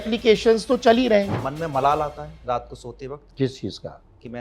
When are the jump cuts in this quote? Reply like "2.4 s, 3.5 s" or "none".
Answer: 1.4 s, 3.2 s